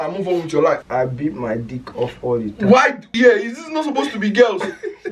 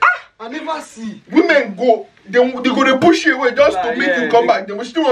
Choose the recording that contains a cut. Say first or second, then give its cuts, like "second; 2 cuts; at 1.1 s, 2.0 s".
first; 2 cuts; at 0.9 s, 3.1 s